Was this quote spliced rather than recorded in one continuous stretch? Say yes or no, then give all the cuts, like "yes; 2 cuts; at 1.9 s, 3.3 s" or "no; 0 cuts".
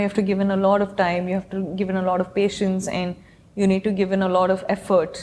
no; 0 cuts